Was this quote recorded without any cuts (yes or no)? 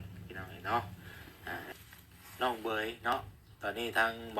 no